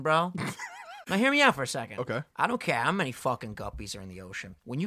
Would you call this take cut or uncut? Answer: cut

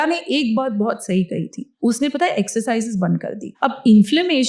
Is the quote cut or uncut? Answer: cut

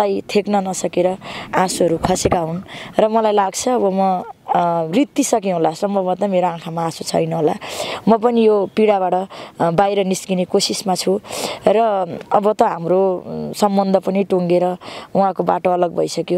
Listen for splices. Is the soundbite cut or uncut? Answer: uncut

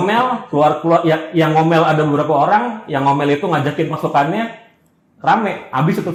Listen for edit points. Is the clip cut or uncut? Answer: uncut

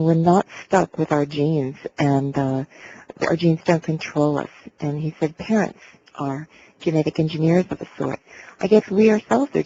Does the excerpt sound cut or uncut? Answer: uncut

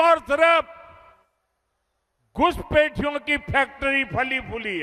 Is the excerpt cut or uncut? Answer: uncut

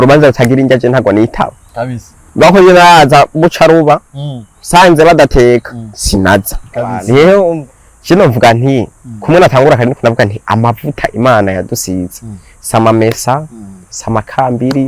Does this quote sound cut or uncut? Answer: cut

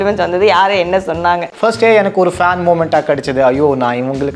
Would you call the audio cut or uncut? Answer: cut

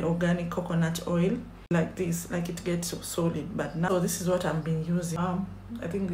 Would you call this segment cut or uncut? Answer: cut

